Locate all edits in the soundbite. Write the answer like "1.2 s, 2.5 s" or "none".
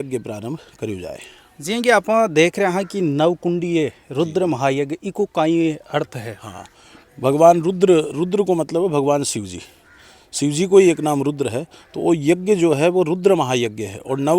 none